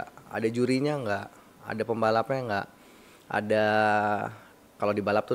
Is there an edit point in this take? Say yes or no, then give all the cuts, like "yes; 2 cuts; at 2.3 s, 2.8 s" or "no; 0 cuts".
no; 0 cuts